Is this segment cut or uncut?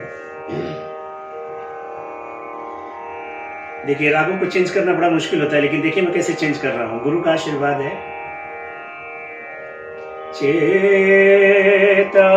uncut